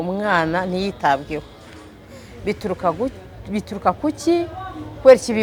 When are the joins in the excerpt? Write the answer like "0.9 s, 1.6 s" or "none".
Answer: none